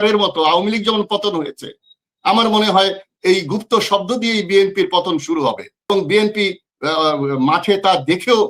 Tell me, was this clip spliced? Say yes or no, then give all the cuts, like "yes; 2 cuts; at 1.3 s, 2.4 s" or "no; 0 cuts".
yes; 1 cut; at 5.9 s